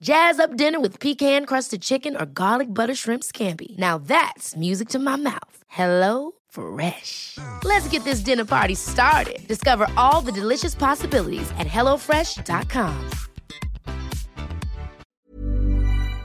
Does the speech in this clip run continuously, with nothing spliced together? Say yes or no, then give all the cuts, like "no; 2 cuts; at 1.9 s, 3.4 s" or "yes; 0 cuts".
no; 1 cut; at 15.0 s